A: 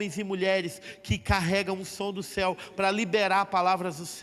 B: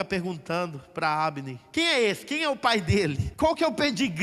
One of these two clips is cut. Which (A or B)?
B